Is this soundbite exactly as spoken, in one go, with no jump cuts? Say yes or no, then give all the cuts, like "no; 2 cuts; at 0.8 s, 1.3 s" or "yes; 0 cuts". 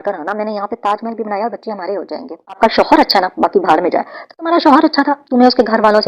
no; 1 cut; at 2.6 s